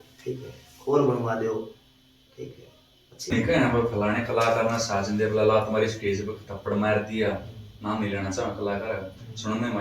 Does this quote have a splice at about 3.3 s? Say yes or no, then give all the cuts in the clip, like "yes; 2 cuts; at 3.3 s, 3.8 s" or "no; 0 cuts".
yes; 1 cut; at 3.3 s